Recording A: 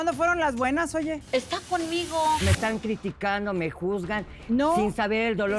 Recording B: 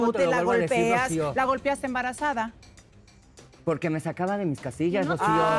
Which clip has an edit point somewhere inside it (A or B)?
A